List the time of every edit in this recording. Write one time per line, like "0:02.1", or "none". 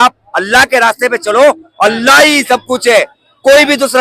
none